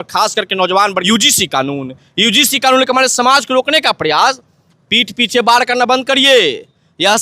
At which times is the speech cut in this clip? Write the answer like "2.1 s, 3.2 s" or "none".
1.0 s